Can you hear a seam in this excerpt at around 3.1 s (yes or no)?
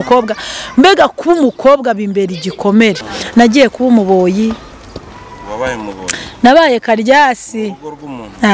yes